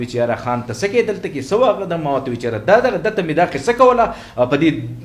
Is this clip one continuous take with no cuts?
yes; 0 cuts

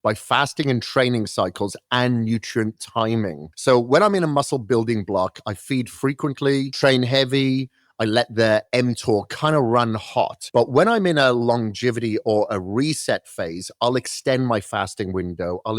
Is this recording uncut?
no; 3 cuts; at 3.5 s, 6.7 s, 10.4 s

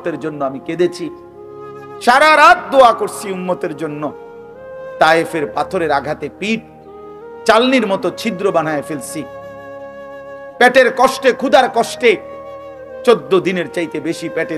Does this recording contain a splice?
yes; 2 cuts; at 9.2 s, 10.5 s

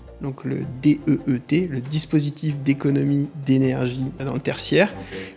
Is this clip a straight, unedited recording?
no; 1 cut; at 4.2 s

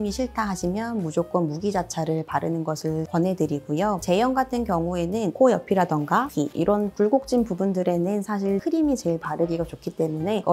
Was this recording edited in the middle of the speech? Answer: no; 0 cuts

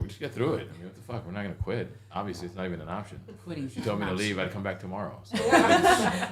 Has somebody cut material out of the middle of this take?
no; 0 cuts

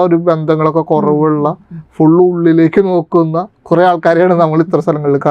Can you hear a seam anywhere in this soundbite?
no; 0 cuts

